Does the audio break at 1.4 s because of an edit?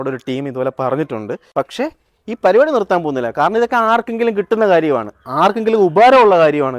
yes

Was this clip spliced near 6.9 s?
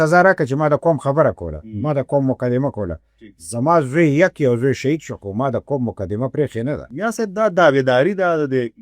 yes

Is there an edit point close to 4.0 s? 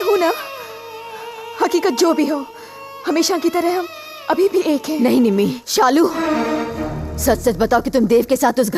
no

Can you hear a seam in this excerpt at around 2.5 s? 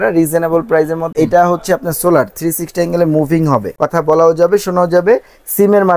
no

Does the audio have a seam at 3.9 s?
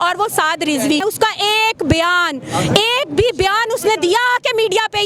no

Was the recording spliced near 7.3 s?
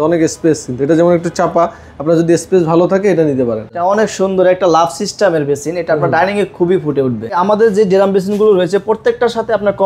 yes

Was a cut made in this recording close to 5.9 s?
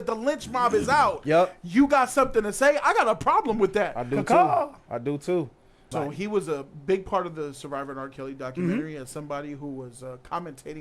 yes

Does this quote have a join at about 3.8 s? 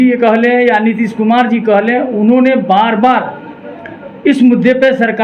no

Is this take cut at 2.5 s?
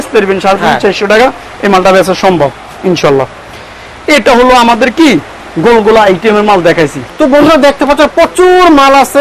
no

